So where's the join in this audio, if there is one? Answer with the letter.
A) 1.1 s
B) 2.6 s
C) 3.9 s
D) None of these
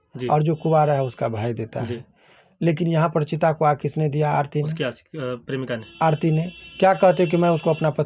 D